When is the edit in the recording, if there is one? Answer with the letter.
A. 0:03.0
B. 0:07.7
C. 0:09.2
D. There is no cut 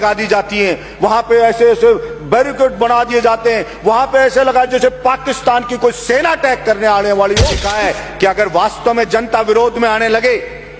B